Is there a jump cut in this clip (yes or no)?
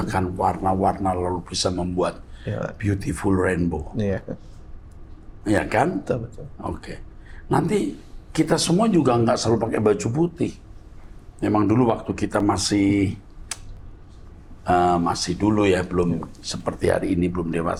no